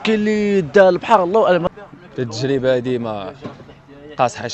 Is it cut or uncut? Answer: cut